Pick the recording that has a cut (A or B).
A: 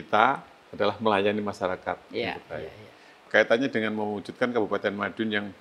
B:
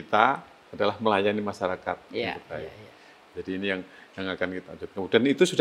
A